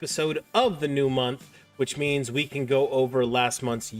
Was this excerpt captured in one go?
yes; 0 cuts

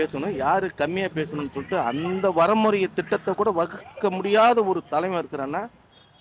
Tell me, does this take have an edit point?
no; 0 cuts

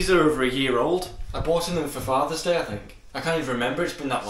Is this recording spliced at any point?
no; 0 cuts

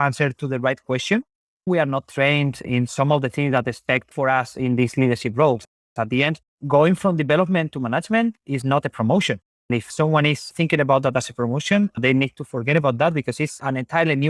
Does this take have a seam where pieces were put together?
yes; 1 cut; at 1.6 s

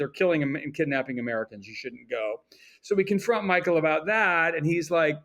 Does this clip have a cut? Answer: no; 0 cuts

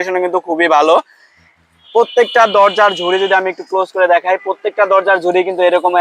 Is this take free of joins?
yes; 0 cuts

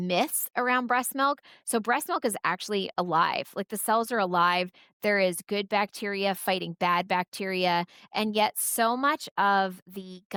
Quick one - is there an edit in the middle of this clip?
no; 0 cuts

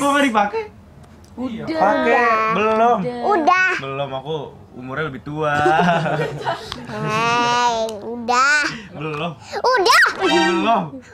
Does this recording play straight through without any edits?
yes; 0 cuts

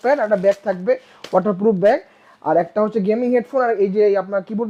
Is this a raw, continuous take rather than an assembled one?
yes; 0 cuts

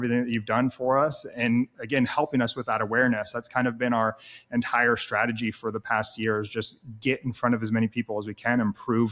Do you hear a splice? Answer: no; 0 cuts

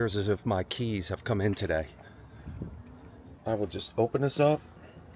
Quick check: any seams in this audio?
yes; 1 cut; at 3.3 s

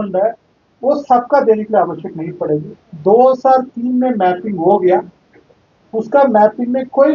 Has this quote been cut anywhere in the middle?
no; 0 cuts

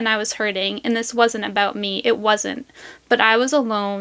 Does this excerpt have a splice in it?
no; 0 cuts

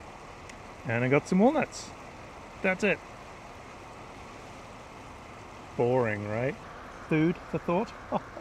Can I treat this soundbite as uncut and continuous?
no; 1 cut; at 6.7 s

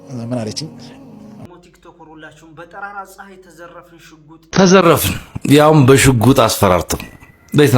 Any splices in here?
yes; 2 cuts; at 1.4 s, 4.4 s

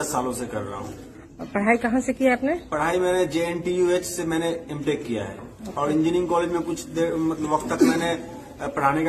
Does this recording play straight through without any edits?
yes; 0 cuts

